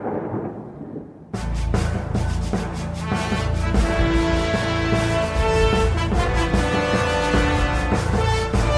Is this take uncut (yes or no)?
no